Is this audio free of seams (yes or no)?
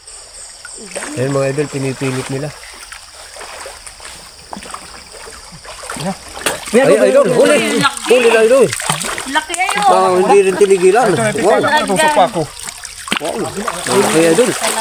no